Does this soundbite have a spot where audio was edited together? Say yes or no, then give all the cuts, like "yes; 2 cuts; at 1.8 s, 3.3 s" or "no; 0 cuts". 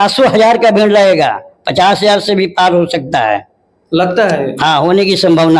no; 0 cuts